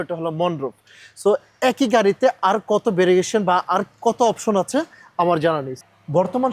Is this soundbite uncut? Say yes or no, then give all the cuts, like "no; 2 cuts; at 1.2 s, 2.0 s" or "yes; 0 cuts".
yes; 0 cuts